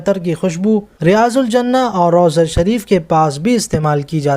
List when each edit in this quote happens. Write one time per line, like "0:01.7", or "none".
0:00.9